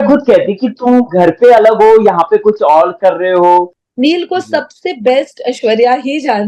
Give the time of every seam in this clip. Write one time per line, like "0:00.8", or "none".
0:03.8